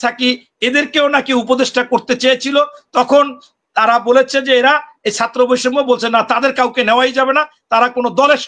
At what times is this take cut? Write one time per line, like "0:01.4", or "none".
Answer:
none